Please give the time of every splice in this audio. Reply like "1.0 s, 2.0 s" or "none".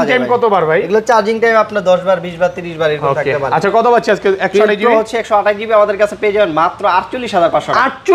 none